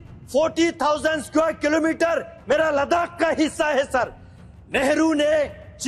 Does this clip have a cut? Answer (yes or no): no